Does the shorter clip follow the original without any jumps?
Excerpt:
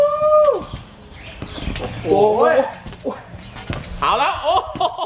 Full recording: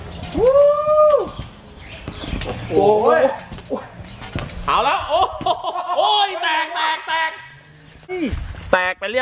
yes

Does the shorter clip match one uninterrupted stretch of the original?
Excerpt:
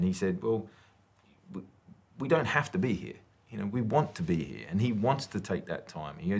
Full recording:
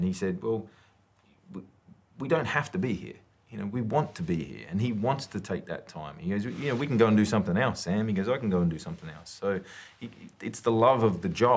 yes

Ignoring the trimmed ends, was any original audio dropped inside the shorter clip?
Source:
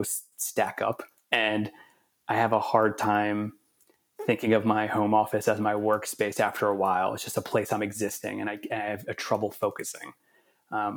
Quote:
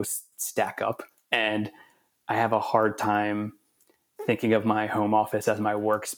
no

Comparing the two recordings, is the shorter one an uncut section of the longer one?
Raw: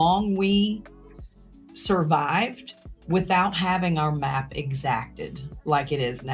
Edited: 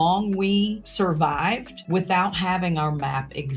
no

